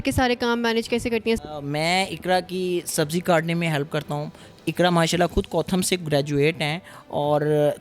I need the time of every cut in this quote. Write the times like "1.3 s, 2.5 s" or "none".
1.4 s